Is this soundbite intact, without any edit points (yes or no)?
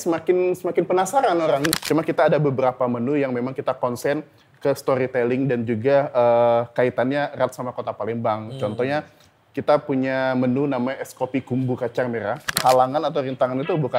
no